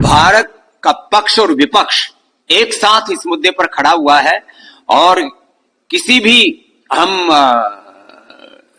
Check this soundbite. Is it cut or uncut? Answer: uncut